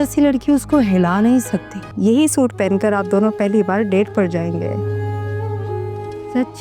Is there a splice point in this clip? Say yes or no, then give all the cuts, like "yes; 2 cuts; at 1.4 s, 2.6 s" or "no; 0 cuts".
yes; 1 cut; at 1.8 s